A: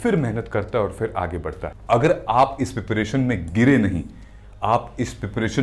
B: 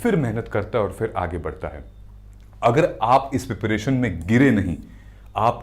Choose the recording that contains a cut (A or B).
A